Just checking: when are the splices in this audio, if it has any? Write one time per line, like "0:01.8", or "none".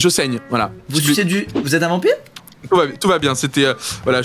0:02.6